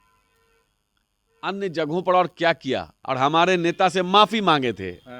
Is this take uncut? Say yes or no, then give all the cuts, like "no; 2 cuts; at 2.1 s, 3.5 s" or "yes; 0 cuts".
no; 1 cut; at 3.0 s